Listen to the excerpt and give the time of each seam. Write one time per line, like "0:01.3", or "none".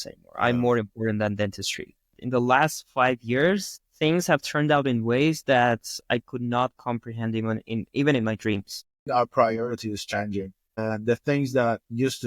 0:02.1
0:09.1